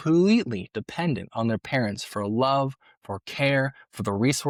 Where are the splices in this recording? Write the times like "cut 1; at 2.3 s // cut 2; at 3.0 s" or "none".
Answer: none